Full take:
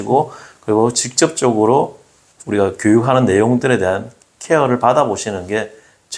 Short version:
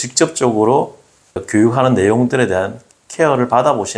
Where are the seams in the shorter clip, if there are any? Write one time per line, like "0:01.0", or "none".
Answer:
0:01.4